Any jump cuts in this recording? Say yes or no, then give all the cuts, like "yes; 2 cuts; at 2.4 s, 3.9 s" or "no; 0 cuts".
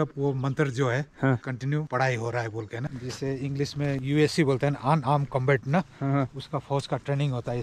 yes; 3 cuts; at 1.8 s, 2.8 s, 4.0 s